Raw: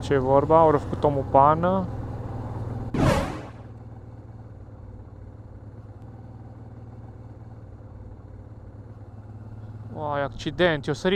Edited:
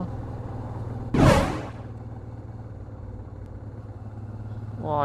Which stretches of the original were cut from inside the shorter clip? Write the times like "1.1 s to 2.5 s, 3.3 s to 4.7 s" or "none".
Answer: 5.3 s to 8.6 s